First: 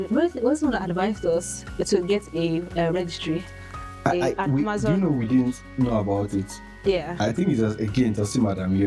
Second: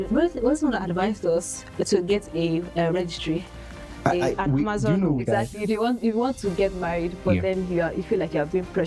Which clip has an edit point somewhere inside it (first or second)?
second